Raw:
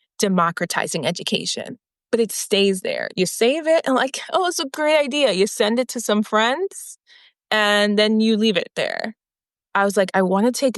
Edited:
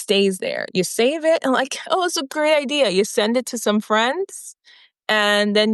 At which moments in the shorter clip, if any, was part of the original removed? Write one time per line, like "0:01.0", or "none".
none